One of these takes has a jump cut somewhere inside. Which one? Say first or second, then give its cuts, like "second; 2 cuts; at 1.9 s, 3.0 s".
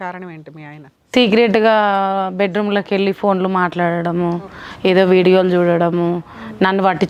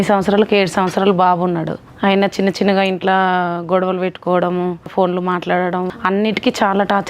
second; 3 cuts; at 1.8 s, 4.9 s, 5.9 s